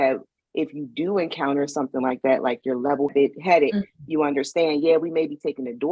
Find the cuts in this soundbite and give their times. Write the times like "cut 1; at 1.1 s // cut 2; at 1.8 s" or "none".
cut 1; at 3.1 s